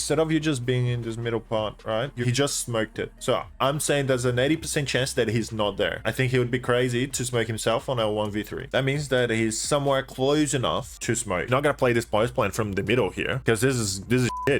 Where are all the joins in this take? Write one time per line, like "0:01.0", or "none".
0:11.5